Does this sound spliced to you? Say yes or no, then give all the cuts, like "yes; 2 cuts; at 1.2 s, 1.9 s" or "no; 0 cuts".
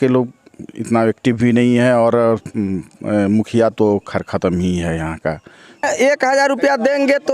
yes; 1 cut; at 5.8 s